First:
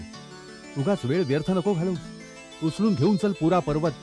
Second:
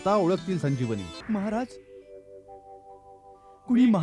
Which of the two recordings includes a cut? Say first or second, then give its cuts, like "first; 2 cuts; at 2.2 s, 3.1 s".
second; 1 cut; at 1.1 s